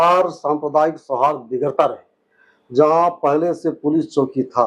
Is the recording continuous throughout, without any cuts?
yes; 0 cuts

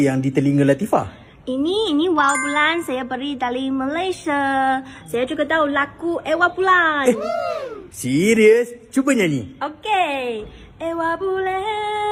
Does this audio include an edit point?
no; 0 cuts

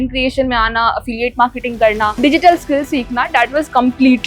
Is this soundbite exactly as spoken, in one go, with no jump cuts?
no; 1 cut; at 2.2 s

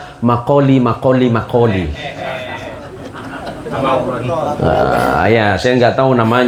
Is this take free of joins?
yes; 0 cuts

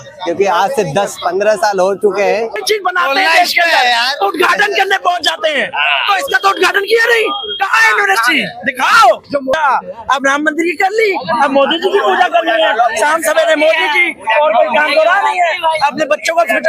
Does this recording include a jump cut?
yes; 2 cuts; at 2.6 s, 9.5 s

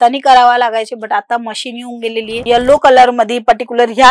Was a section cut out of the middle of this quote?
yes; 1 cut; at 2.4 s

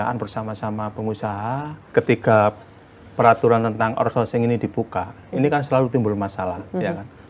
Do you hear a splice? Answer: yes; 1 cut; at 1.9 s

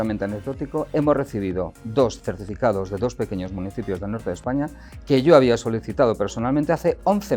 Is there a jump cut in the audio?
no; 0 cuts

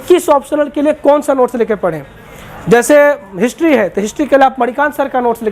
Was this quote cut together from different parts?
no; 0 cuts

